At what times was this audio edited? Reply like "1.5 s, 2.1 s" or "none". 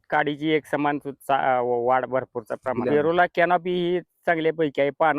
2.7 s

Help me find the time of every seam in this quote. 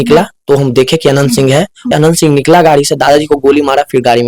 1.9 s

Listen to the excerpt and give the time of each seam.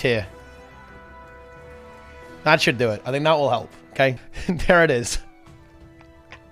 4.3 s

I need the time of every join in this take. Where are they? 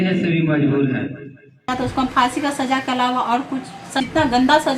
1.7 s, 4.0 s

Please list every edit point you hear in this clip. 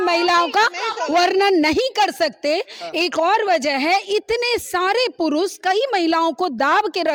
none

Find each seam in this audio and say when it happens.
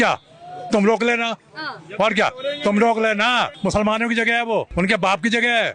3.5 s, 4.7 s

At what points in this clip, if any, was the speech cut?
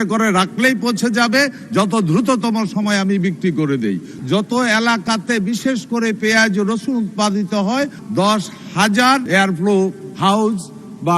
4.1 s, 8.0 s, 9.3 s

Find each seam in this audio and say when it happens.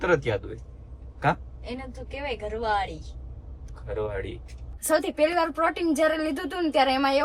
4.6 s

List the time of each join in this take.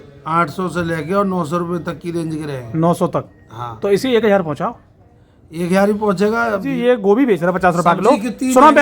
6.7 s

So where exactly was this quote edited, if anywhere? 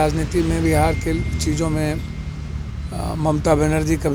none

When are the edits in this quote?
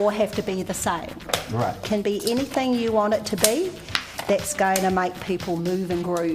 1.8 s

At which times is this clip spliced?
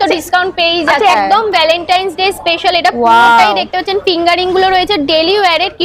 1.1 s

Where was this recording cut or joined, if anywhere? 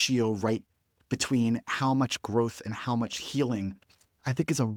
none

